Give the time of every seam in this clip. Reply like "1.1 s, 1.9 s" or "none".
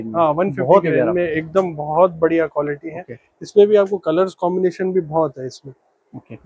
none